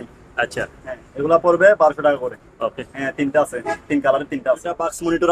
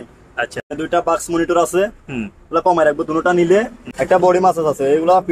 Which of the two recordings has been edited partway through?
second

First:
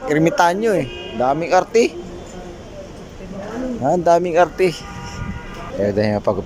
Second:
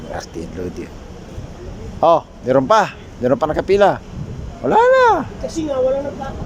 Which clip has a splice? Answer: first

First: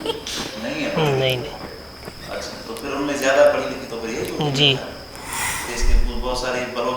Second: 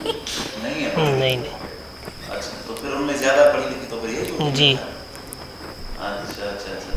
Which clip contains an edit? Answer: first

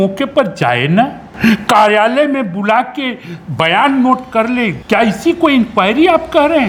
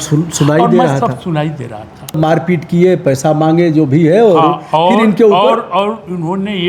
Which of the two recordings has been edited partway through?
second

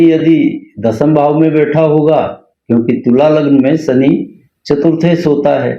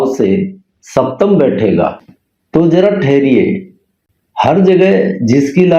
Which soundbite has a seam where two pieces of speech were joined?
second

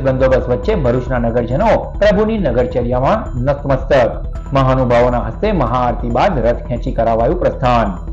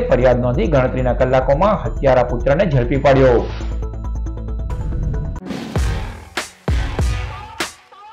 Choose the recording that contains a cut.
second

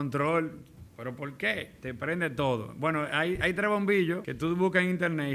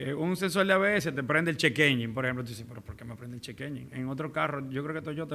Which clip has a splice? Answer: first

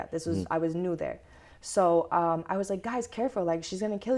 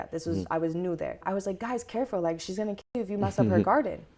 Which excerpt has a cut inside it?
second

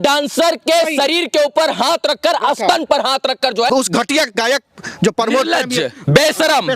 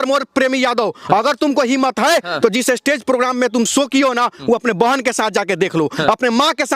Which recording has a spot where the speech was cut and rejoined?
first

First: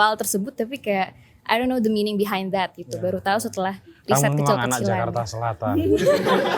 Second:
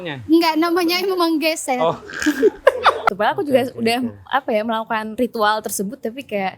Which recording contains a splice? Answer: second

